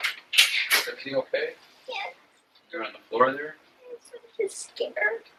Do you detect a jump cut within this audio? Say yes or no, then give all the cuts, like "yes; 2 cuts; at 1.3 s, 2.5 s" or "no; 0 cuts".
no; 0 cuts